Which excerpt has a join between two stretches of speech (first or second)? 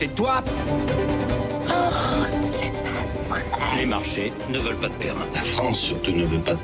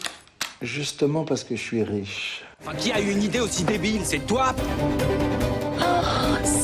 second